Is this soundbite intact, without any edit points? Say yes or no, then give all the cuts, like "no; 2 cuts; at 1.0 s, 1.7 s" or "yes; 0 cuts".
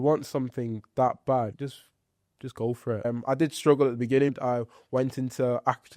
no; 3 cuts; at 1.5 s, 3.1 s, 4.3 s